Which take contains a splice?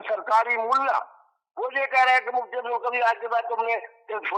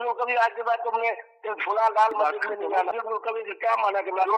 second; 1 cut; at 3.0 s

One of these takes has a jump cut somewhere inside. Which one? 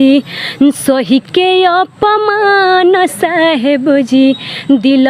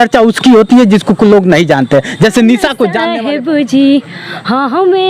second; 1 cut; at 3.0 s

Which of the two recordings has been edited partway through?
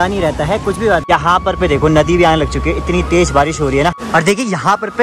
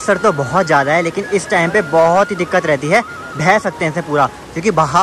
first; 2 cuts; at 1.0 s, 4.0 s

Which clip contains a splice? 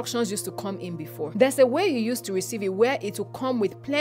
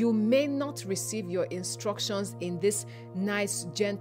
first; 1 cut; at 1.3 s

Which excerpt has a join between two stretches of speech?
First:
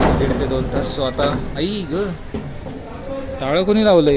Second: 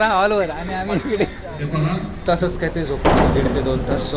second; 1 cut; at 2.2 s

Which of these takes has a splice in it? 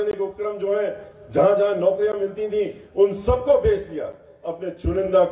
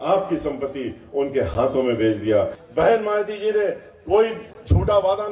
second; 1 cut; at 2.6 s

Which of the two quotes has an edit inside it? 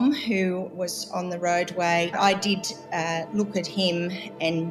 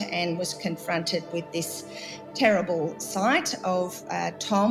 first; 1 cut; at 2.1 s

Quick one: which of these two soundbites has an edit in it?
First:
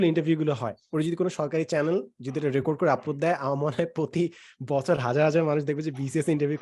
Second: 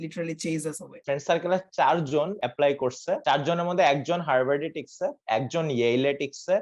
second; 3 cuts; at 0.9 s, 2.4 s, 3.2 s

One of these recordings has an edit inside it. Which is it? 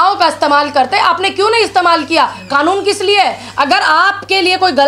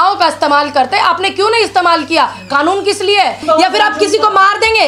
second; 1 cut; at 3.4 s

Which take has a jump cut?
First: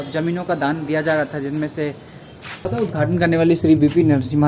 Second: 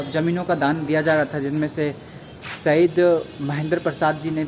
first; 1 cut; at 2.7 s

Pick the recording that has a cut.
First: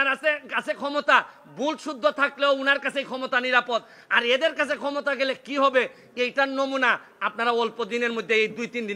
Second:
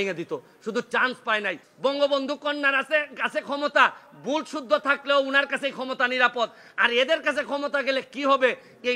second; 1 cut; at 1.6 s

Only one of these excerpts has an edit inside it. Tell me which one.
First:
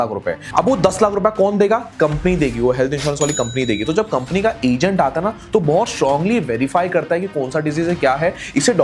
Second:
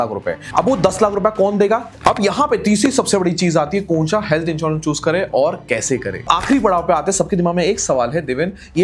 second; 2 cuts; at 1.9 s, 6.2 s

